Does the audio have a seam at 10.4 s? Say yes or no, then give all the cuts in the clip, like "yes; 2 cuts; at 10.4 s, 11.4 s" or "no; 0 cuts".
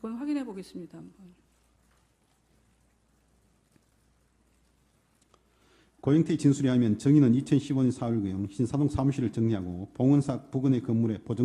no; 1 cut; at 7.5 s